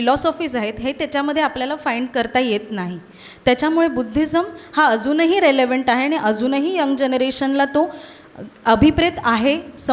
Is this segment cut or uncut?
uncut